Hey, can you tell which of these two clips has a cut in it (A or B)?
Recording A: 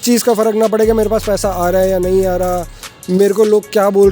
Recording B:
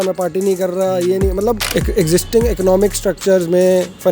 B